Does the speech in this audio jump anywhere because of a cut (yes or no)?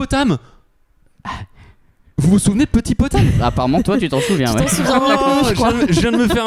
no